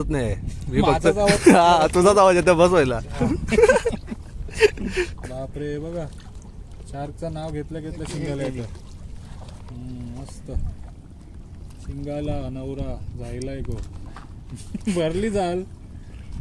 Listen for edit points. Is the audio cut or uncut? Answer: cut